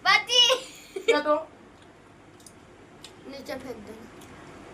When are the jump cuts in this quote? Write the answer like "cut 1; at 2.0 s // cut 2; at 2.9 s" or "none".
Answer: cut 1; at 1.1 s